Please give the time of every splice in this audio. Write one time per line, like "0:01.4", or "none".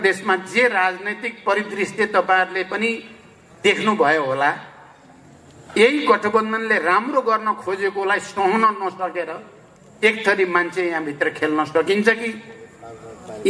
none